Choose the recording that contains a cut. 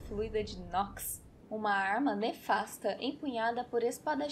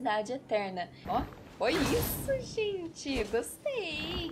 second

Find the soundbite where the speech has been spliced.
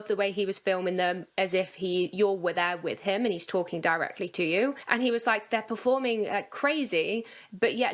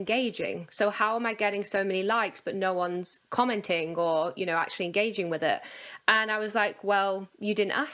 first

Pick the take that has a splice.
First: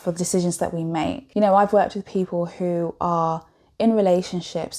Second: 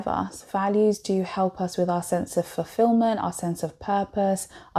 first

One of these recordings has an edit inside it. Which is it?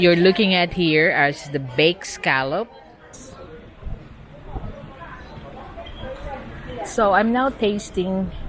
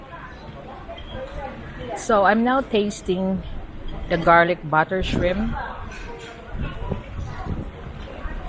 first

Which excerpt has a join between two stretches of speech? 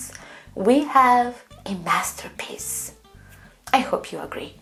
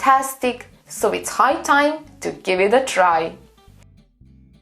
second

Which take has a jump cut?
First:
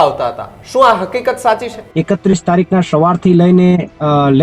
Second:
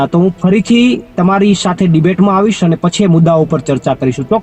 first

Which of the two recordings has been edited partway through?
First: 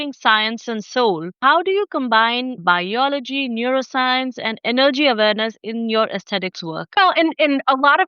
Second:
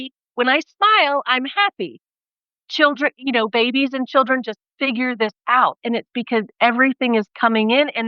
first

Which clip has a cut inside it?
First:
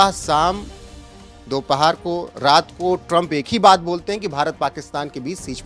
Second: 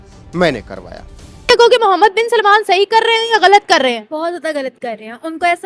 second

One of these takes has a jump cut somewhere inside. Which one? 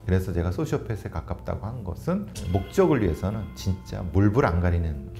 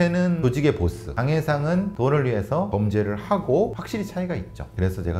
second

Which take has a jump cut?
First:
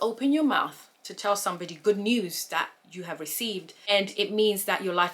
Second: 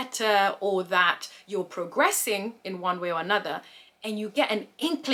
first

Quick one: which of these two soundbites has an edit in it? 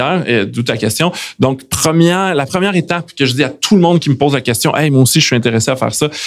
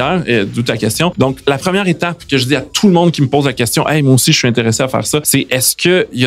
second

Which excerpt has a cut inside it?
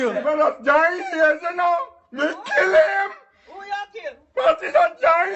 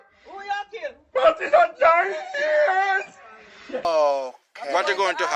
second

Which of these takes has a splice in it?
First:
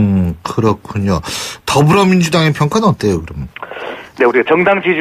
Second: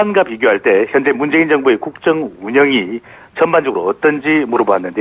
second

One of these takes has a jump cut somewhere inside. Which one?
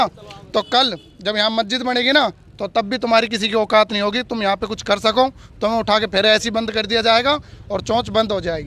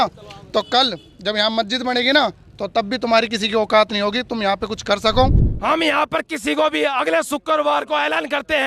second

